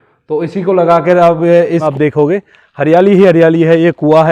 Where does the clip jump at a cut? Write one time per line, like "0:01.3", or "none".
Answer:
0:01.9